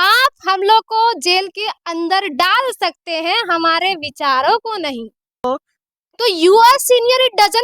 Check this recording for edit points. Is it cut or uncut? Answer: cut